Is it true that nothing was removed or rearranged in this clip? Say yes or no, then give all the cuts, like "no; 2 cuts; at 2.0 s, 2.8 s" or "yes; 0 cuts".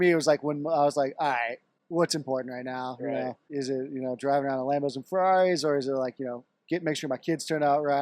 no; 2 cuts; at 1.7 s, 3.4 s